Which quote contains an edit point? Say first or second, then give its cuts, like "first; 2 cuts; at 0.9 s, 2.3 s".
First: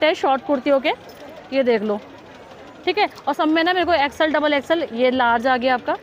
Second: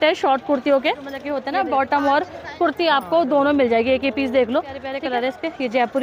second; 2 cuts; at 1.3 s, 4.9 s